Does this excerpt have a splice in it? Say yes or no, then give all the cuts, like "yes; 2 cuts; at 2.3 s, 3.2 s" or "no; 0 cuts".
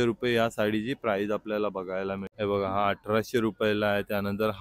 yes; 1 cut; at 2.3 s